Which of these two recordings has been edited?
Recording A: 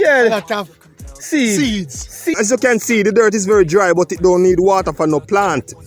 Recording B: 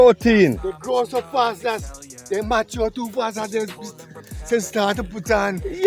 A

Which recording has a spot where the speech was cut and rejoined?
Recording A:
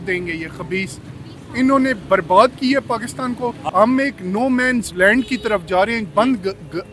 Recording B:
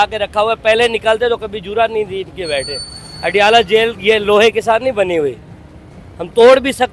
A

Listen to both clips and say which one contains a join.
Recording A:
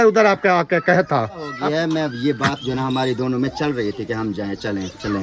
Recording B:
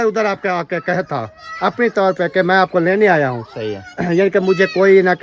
A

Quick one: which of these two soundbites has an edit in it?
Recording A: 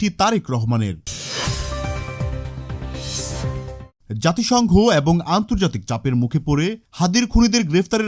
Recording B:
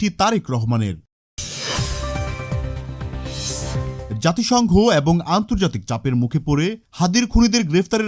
A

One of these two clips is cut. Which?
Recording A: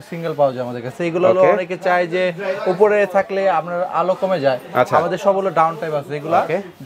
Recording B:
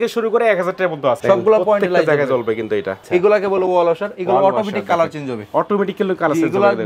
B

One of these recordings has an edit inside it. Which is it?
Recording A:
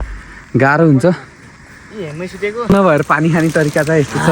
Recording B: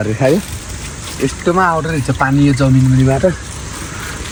A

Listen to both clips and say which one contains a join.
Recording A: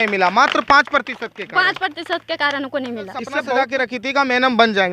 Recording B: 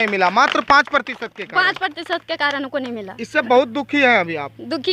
A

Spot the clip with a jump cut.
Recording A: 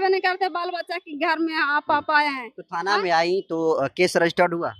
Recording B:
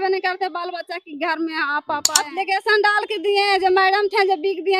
B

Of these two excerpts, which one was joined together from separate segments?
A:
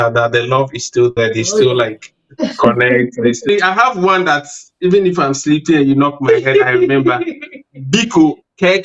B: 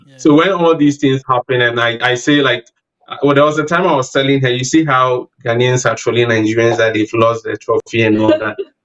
A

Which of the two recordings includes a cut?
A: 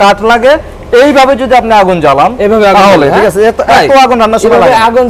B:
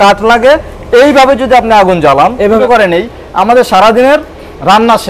B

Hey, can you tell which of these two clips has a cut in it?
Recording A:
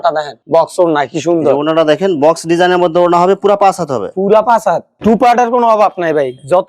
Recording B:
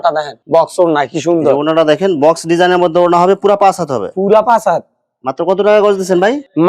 A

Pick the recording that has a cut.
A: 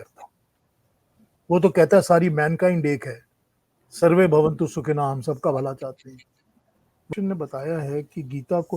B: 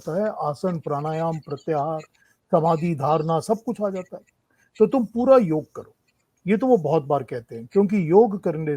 A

